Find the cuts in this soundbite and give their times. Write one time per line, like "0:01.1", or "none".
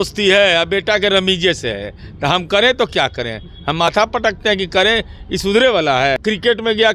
0:03.9
0:06.2

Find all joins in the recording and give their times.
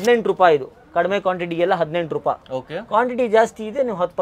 none

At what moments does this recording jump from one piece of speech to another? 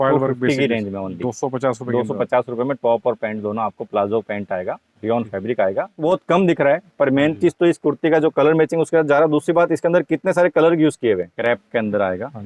0:06.0
0:11.3

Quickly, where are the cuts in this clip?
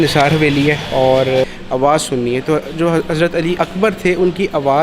0:01.6

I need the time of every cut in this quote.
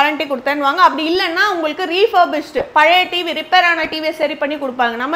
none

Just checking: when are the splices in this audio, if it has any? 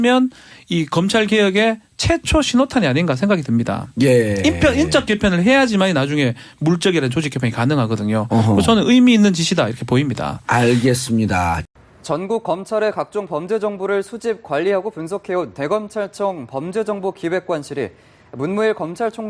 none

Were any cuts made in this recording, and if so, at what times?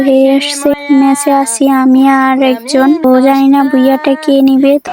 0:03.0

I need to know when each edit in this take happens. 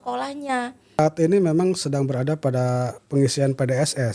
0:01.0

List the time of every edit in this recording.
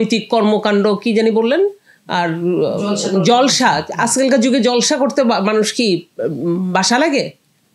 none

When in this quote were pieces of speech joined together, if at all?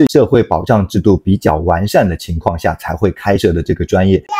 none

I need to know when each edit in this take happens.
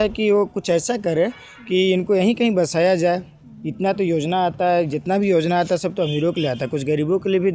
none

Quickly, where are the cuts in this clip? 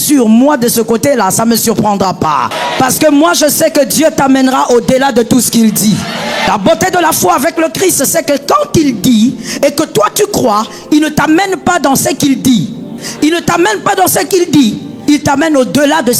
0:02.6
0:06.5
0:13.0

